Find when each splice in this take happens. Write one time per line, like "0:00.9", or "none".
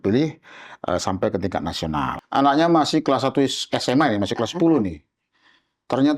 0:02.1